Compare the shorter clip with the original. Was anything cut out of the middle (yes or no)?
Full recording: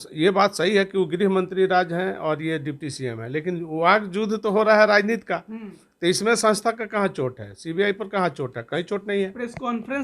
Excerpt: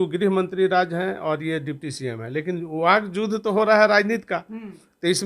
no